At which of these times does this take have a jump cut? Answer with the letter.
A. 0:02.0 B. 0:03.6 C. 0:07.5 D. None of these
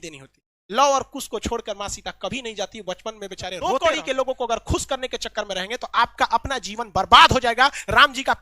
B